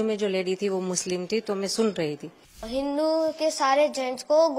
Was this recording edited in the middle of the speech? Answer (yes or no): yes